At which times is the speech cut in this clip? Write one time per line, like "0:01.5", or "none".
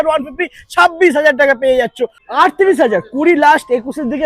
0:02.1